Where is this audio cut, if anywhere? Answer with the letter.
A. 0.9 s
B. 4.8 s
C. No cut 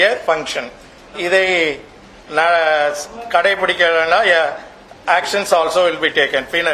C